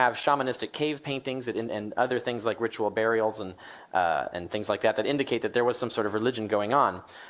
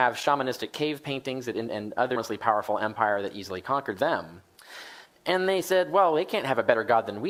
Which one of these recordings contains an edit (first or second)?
first